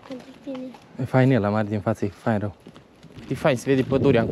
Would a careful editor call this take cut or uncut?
cut